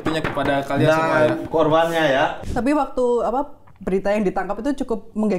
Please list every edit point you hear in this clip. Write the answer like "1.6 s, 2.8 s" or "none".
2.4 s